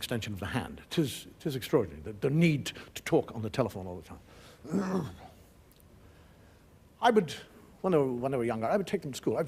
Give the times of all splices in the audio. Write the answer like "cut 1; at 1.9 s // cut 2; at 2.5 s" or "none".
none